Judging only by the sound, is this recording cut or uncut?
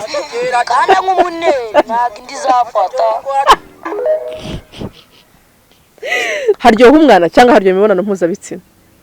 cut